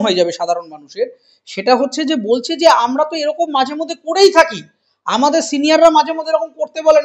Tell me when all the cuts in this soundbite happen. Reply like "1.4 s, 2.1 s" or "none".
none